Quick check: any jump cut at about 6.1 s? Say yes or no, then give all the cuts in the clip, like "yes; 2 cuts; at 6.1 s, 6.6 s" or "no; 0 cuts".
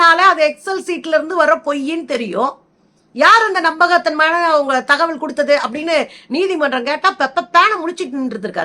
no; 0 cuts